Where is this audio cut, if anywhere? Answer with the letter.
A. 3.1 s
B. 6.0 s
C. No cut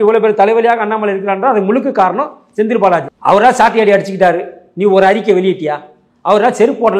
A